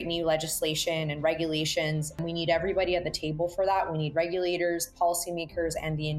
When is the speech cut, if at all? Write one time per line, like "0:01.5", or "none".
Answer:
0:02.2